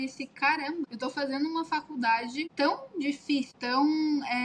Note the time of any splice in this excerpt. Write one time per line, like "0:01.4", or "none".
0:00.9
0:02.5
0:03.6